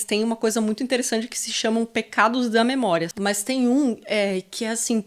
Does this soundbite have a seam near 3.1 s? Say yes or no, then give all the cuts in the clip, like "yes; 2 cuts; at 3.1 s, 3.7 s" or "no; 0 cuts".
yes; 1 cut; at 3.1 s